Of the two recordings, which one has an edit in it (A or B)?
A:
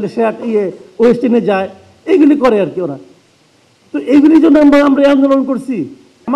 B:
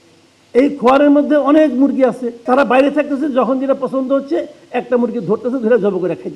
B